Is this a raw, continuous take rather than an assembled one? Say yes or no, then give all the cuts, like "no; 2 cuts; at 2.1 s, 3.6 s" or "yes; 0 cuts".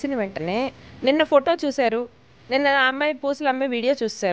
yes; 0 cuts